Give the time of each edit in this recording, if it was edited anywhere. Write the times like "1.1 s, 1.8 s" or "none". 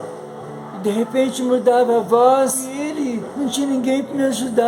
2.8 s